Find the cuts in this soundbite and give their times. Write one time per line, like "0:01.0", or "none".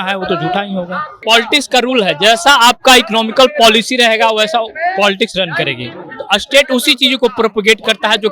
0:01.1